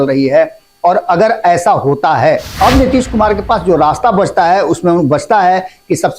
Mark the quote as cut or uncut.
cut